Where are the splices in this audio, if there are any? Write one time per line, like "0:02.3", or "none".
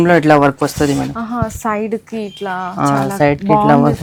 none